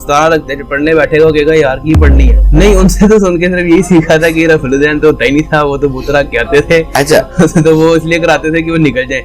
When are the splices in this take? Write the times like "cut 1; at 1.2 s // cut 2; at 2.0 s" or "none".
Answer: cut 1; at 2.3 s